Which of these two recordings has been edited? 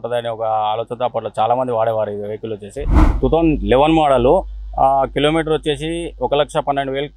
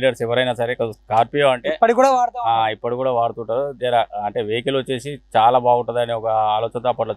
first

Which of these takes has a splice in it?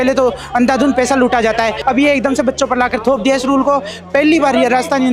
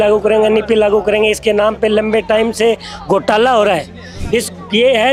first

